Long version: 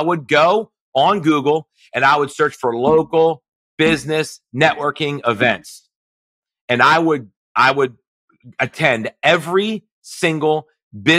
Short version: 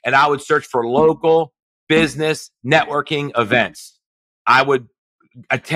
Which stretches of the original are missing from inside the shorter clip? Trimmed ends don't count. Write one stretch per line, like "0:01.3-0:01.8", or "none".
0:06.2-0:07.4